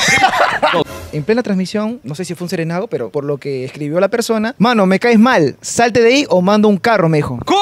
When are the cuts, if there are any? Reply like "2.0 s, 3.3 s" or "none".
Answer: 0.8 s, 2.0 s, 3.1 s, 4.5 s

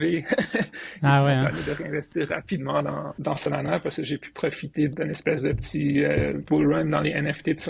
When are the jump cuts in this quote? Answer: 3.1 s, 4.9 s, 6.4 s

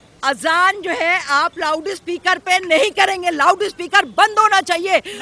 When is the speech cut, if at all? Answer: none

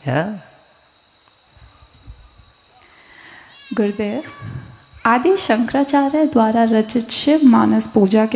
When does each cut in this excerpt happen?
1.5 s

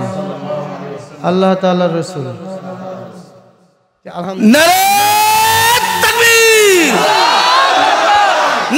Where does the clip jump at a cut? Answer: none

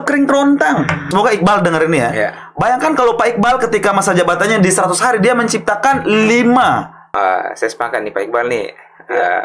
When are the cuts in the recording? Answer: 1.0 s, 7.0 s

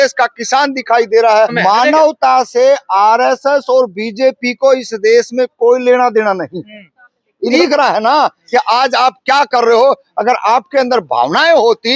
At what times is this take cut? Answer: 1.5 s, 7.6 s

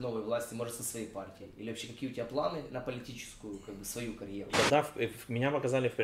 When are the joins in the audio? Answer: 4.5 s

